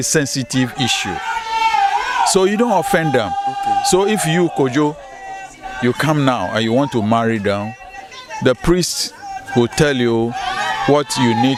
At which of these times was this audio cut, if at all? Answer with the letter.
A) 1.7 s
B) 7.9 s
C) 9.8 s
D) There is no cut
D